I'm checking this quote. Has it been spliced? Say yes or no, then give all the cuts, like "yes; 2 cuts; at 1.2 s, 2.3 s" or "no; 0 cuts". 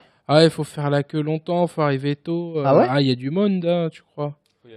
no; 0 cuts